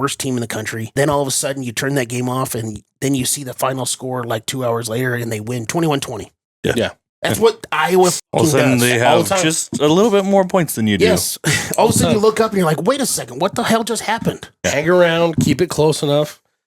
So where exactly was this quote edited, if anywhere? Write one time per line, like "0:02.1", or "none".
0:00.9
0:05.7